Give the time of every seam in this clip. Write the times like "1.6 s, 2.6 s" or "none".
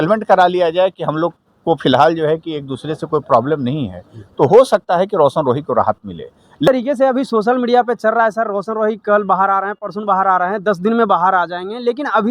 6.7 s